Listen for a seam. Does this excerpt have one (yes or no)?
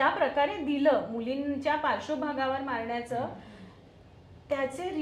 no